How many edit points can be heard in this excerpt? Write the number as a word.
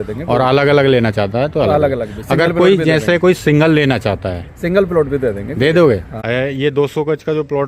one